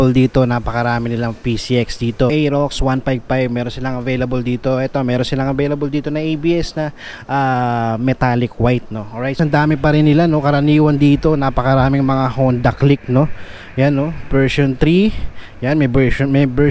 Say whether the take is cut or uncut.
cut